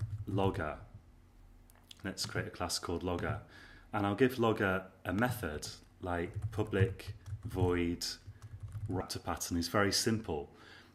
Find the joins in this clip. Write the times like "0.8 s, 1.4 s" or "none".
none